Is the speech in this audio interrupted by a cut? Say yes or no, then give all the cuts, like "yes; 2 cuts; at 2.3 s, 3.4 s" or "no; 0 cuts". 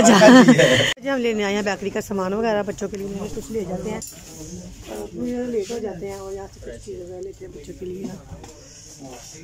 yes; 1 cut; at 1.0 s